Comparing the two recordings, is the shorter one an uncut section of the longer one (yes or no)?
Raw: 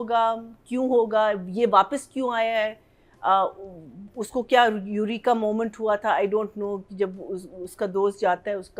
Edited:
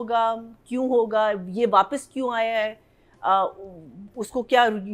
yes